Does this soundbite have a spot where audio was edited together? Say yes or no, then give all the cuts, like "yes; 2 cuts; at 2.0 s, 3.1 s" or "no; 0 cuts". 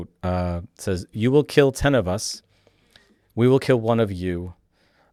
no; 0 cuts